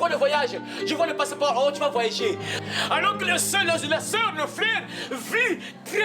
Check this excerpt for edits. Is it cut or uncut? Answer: cut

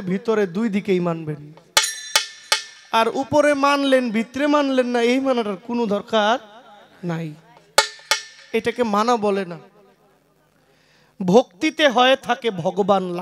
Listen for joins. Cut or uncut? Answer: uncut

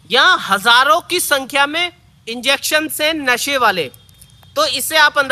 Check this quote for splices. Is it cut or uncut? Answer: uncut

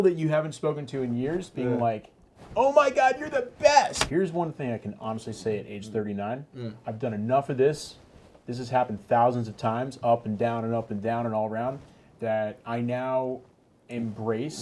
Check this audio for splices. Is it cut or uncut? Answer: cut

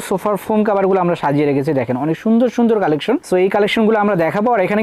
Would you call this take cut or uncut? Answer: uncut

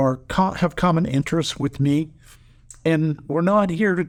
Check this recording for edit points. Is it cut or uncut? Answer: uncut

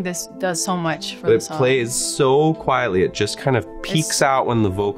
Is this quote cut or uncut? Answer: uncut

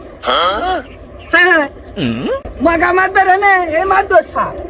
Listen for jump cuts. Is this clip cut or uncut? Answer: uncut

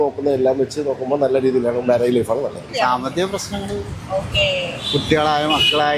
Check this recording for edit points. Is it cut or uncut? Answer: cut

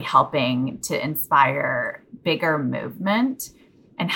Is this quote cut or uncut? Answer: uncut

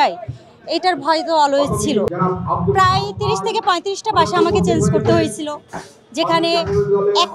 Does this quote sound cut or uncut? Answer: cut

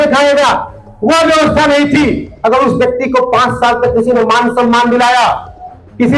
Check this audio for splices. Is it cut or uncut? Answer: uncut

